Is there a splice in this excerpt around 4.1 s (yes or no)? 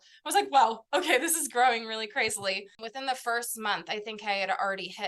no